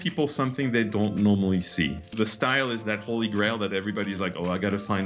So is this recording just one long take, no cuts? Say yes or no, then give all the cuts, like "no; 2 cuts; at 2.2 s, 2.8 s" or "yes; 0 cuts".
no; 1 cut; at 2.0 s